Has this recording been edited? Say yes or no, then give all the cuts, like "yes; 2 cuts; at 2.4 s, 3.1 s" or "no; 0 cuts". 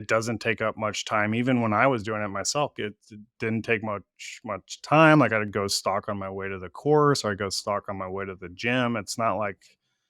yes; 1 cut; at 2.8 s